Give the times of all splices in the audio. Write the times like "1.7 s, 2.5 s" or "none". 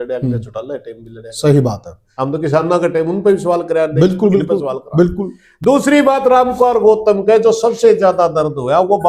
none